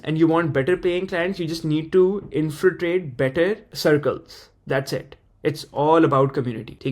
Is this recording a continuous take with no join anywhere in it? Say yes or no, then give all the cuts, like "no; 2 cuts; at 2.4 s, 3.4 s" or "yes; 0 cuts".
yes; 0 cuts